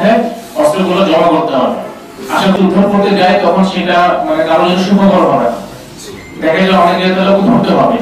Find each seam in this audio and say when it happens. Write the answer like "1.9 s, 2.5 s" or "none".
2.5 s